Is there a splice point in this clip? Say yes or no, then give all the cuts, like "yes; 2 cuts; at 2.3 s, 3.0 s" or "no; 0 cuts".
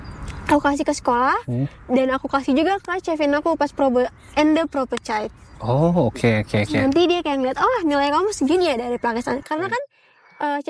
no; 0 cuts